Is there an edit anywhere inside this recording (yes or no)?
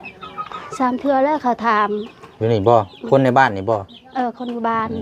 no